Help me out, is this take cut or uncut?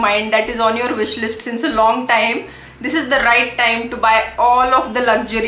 uncut